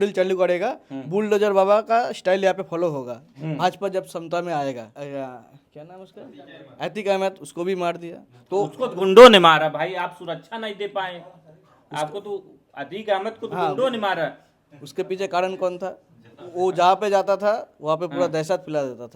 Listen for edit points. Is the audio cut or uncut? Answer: cut